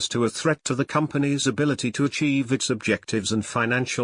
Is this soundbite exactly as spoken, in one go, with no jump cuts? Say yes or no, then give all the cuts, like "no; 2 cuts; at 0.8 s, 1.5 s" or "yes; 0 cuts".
no; 1 cut; at 2.1 s